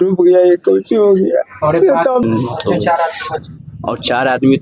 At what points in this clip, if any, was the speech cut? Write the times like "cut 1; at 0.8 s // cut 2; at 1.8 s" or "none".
cut 1; at 2.2 s